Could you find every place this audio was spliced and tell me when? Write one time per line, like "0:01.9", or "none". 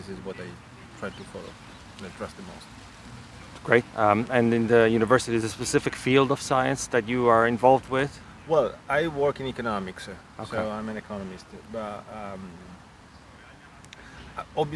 none